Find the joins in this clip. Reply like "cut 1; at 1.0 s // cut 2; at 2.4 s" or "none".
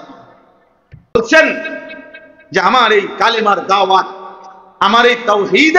cut 1; at 1.1 s